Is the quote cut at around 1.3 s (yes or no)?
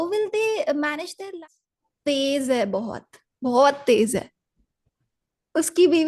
yes